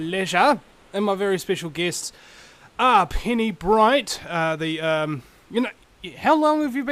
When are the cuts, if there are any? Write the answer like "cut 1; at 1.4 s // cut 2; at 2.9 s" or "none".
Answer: none